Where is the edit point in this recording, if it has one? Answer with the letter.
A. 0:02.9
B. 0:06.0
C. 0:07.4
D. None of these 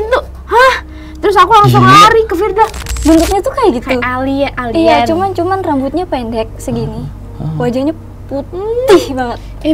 A